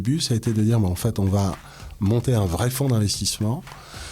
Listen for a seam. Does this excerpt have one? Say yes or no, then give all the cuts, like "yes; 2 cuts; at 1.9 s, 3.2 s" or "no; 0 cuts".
no; 0 cuts